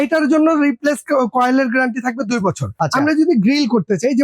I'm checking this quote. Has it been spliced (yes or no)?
yes